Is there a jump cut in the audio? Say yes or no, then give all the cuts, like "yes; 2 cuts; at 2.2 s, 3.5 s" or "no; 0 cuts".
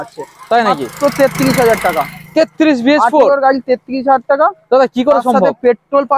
no; 0 cuts